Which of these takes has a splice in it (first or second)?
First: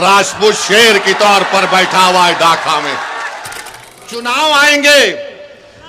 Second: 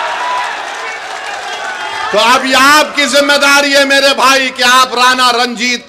first